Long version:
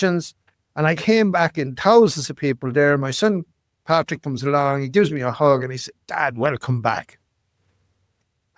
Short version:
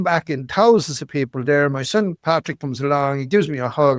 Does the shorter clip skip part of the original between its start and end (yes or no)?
yes